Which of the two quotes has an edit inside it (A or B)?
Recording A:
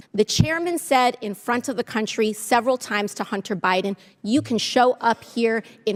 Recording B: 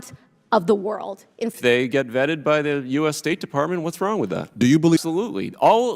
B